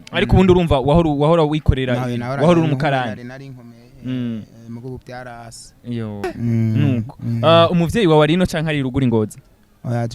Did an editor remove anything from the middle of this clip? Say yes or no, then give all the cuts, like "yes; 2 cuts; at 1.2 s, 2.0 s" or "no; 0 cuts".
yes; 1 cut; at 6.2 s